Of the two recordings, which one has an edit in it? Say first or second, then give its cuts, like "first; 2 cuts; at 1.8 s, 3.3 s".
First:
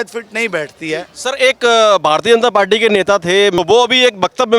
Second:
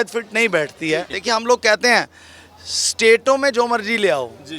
second; 1 cut; at 1.1 s